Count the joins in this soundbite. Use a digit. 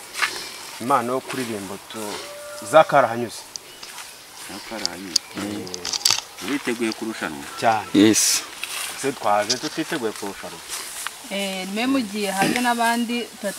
0